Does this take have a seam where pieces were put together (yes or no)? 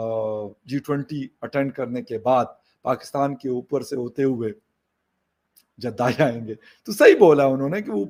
no